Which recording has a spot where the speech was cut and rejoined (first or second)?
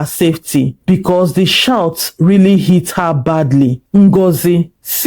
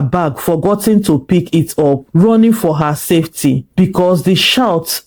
first